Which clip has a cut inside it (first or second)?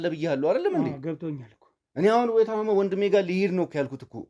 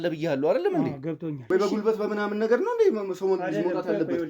second